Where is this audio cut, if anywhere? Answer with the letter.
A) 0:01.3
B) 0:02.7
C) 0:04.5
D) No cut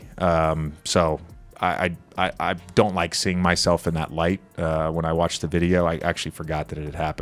D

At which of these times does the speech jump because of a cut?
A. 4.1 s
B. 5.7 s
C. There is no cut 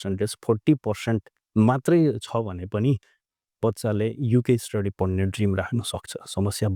C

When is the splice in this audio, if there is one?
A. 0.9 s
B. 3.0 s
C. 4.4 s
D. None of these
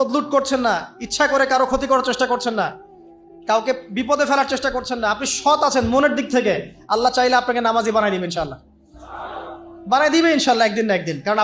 D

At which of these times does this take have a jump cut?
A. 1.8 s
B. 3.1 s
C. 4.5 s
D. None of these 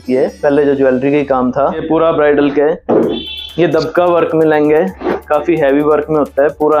A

